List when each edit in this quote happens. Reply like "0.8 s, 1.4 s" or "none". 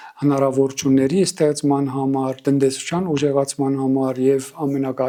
none